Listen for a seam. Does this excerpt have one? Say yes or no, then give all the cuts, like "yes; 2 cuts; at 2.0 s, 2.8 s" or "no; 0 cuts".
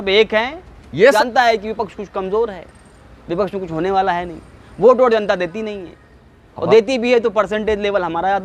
yes; 1 cut; at 1.1 s